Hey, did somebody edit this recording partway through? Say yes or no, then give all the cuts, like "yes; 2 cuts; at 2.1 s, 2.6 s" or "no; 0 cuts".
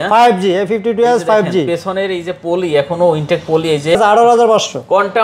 yes; 1 cut; at 4.0 s